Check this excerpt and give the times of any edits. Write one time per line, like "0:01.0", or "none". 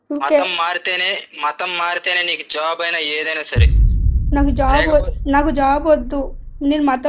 none